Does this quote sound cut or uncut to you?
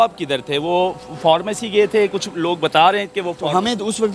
uncut